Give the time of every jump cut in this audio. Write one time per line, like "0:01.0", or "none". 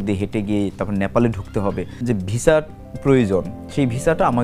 0:02.0
0:02.8